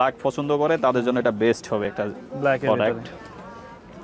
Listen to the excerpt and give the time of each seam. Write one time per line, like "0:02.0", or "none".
none